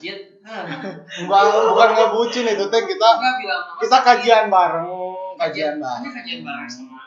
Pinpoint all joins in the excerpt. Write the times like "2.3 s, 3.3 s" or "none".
none